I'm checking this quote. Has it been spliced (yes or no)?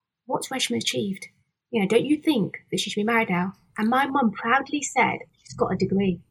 yes